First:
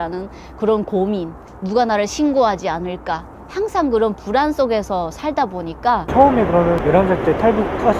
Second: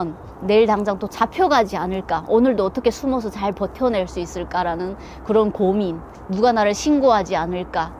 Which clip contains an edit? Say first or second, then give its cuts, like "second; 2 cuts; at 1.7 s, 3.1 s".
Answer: first; 1 cut; at 6.1 s